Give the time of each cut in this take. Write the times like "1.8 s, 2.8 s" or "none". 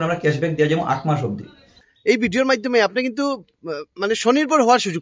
1.8 s